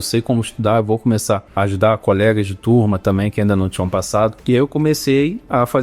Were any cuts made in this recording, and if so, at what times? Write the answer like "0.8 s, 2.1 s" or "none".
2.0 s, 4.4 s